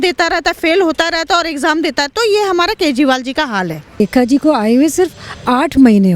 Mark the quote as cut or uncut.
cut